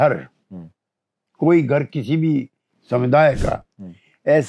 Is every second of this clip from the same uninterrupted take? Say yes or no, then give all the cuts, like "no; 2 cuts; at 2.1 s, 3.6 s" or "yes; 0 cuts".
yes; 0 cuts